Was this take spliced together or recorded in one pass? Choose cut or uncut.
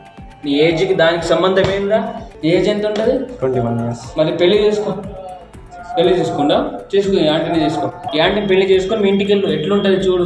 cut